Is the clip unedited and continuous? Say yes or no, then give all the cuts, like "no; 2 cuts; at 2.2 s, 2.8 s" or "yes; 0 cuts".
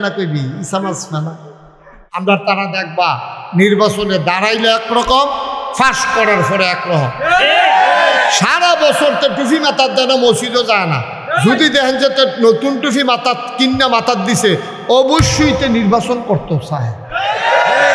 no; 1 cut; at 2.0 s